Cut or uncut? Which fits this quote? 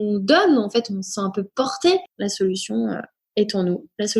cut